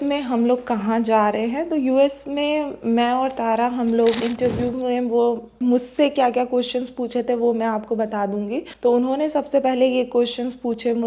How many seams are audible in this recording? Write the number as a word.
three